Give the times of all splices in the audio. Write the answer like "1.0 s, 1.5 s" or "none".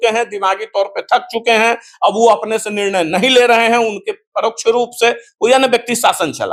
none